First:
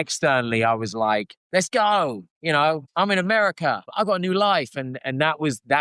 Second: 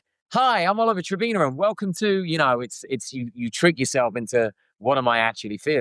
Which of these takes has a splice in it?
first; 3 cuts; at 1.4 s, 2.9 s, 3.9 s

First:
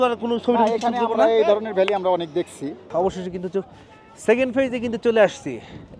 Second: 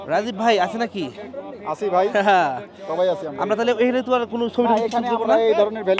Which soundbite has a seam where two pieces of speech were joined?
first; 1 cut; at 2.8 s

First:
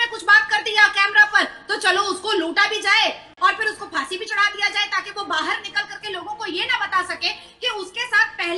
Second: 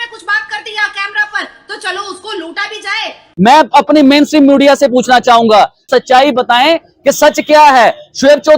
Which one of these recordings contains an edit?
second; 1 cut; at 3.2 s

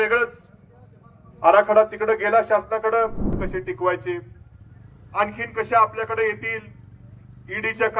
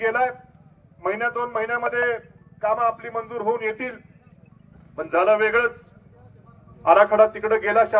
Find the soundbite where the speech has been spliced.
first; 1 cut; at 3.5 s

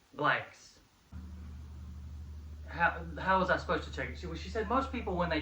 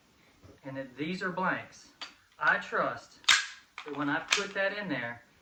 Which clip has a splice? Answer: first; 1 cut; at 1.1 s

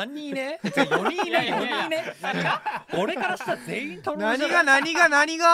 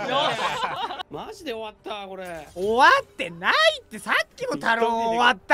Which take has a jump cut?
second; 1 cut; at 1.0 s

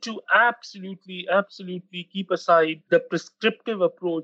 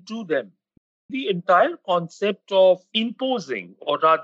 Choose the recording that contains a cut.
second; 2 cuts; at 1.1 s, 2.9 s

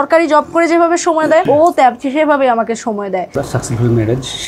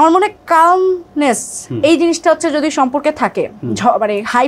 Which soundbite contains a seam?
first; 2 cuts; at 1.4 s, 3.3 s

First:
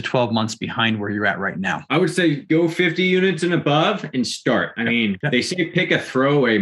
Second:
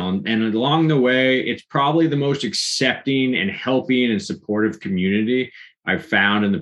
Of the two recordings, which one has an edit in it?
first; 3 cuts; at 1.8 s, 2.4 s, 5.0 s

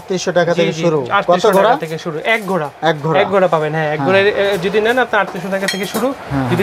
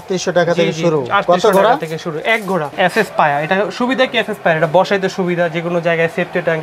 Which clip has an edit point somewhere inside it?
second; 1 cut; at 2.7 s

